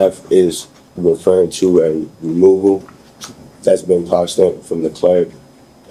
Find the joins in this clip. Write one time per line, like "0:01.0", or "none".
none